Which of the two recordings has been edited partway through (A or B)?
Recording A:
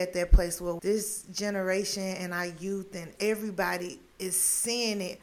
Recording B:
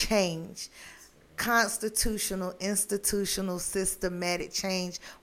A